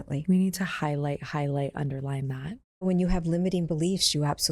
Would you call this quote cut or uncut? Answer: cut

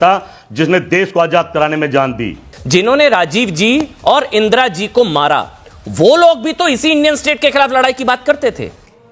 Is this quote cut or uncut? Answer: cut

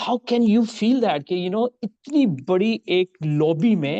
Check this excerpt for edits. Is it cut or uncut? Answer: uncut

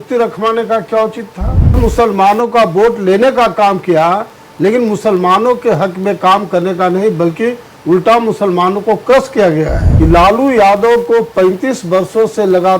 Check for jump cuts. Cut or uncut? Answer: cut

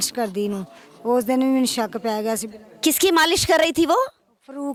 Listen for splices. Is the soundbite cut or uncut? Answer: uncut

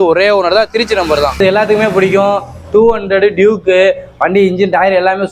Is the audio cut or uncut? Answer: cut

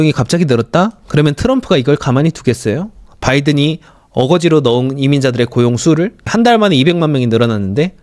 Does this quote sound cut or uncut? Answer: cut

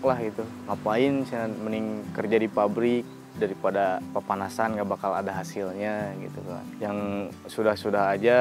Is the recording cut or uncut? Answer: uncut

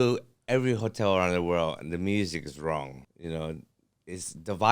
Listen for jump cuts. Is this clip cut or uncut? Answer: cut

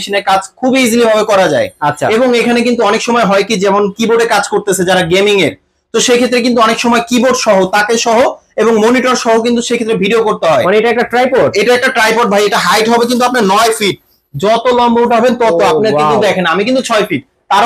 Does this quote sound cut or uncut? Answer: uncut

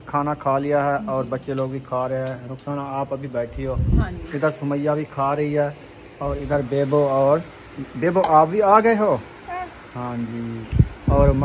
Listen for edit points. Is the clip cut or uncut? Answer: uncut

